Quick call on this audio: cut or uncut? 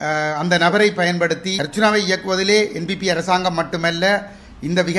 cut